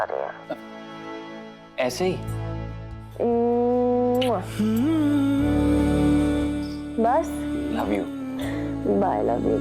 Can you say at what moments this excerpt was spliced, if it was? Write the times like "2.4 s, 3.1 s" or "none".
2.4 s, 7.7 s